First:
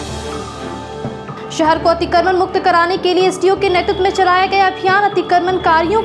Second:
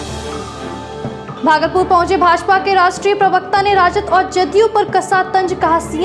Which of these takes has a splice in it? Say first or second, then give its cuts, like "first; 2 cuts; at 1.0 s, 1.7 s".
second; 1 cut; at 1.3 s